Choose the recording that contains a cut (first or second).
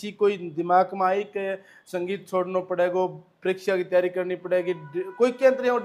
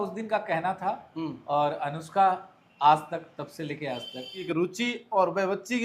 second